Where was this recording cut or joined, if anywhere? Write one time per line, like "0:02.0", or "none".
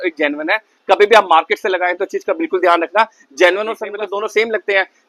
0:03.9